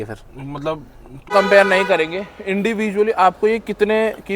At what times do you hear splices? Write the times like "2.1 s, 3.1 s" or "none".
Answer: 1.3 s